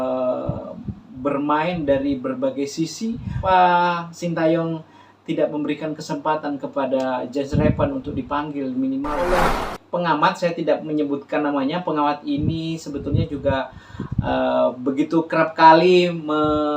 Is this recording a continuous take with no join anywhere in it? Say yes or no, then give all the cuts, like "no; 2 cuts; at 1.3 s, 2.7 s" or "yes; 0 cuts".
no; 2 cuts; at 3.4 s, 9.4 s